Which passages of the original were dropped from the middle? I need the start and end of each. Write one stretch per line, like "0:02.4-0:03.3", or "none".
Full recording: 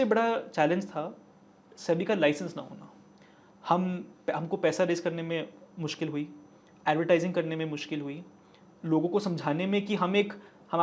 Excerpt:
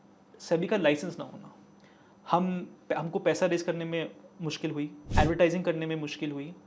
0:06.4-0:06.7

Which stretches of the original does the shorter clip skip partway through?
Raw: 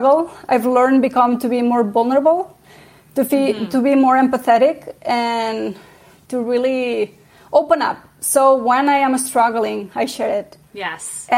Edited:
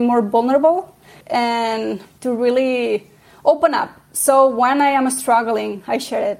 0:02.8-0:04.9
0:05.8-0:06.2

